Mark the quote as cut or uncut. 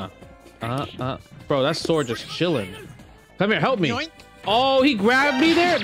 uncut